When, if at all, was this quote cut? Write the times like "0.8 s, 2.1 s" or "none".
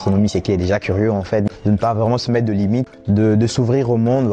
1.5 s, 2.9 s